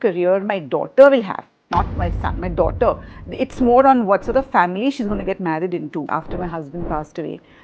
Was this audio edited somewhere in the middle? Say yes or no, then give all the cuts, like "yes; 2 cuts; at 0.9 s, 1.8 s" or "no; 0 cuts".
yes; 1 cut; at 6.1 s